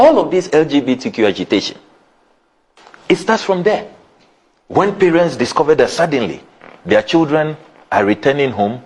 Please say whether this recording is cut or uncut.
uncut